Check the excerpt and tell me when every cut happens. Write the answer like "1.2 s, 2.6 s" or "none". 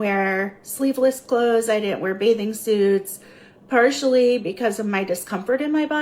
2.4 s